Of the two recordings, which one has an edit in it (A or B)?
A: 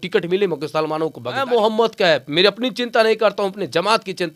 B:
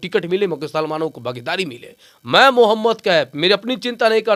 A